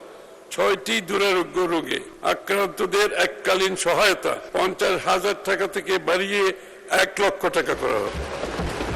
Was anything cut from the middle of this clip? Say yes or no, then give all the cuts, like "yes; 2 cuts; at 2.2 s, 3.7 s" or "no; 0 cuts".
yes; 2 cuts; at 2.0 s, 4.4 s